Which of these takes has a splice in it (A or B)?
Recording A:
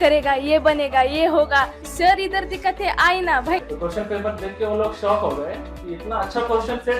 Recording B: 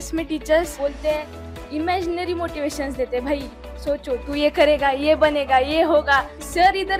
A